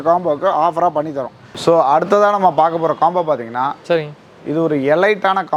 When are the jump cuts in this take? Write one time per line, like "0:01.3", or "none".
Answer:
none